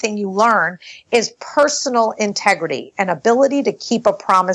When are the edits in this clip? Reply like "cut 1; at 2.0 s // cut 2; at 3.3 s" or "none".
none